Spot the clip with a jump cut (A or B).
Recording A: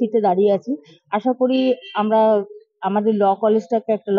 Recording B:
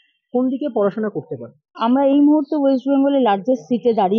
B